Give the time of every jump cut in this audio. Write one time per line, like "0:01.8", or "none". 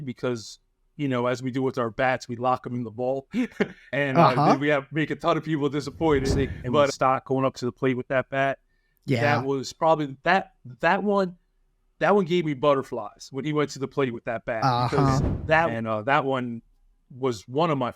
0:06.9
0:15.7